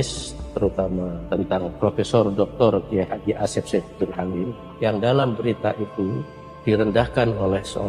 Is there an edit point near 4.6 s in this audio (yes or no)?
yes